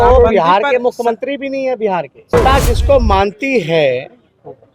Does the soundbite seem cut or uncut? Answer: cut